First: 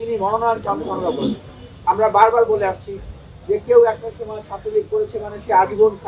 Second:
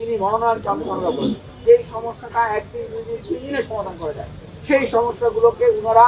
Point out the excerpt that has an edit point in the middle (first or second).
second